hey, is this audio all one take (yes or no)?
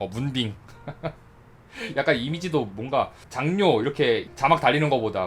no